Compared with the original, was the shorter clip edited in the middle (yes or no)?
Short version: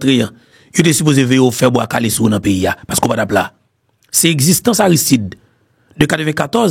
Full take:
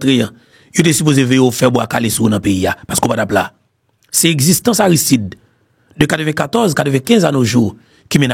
no